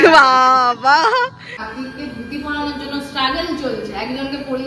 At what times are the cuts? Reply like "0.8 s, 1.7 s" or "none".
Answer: 1.5 s